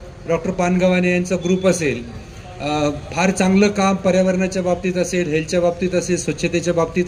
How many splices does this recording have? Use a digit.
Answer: 0